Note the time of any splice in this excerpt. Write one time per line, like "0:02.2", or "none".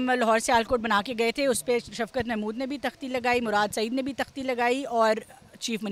none